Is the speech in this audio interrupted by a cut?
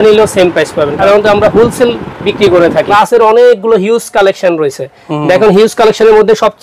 yes; 2 cuts; at 1.0 s, 2.9 s

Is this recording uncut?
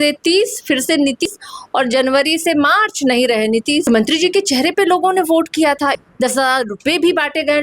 no; 3 cuts; at 1.3 s, 3.8 s, 6.0 s

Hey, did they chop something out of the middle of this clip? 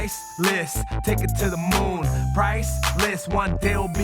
no; 0 cuts

